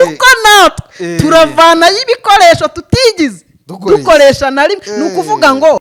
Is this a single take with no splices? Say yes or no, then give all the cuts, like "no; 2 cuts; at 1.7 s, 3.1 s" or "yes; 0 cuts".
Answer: yes; 0 cuts